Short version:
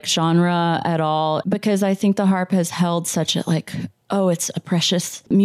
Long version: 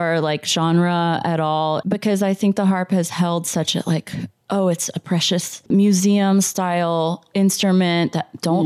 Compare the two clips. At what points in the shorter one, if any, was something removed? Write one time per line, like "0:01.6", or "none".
none